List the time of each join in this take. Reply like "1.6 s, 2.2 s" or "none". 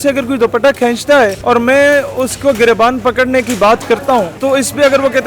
1.4 s, 4.3 s